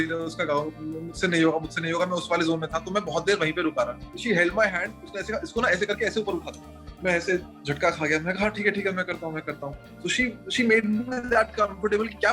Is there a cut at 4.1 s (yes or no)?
yes